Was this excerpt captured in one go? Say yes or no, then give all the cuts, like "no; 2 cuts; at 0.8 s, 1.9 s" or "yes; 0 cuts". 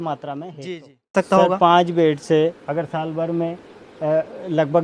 no; 1 cut; at 1.1 s